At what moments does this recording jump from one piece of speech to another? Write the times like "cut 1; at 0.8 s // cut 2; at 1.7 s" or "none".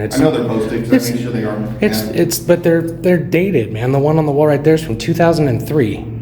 none